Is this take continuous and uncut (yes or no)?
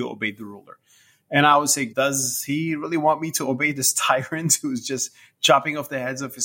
no